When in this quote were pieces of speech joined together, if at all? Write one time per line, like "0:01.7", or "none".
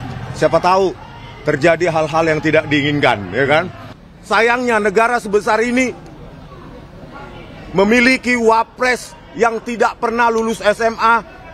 0:03.8